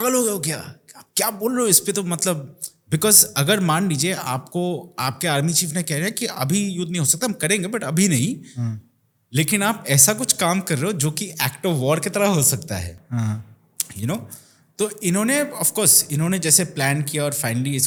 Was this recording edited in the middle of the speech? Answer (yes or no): no